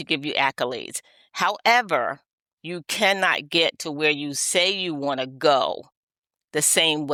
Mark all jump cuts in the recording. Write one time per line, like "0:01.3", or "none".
none